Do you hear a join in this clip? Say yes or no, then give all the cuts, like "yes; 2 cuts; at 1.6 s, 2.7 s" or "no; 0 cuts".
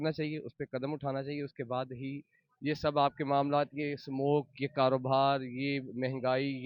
no; 0 cuts